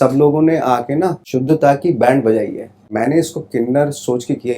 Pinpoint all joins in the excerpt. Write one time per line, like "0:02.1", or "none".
0:01.2
0:02.9